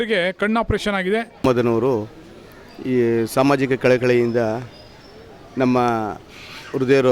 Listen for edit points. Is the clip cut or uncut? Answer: cut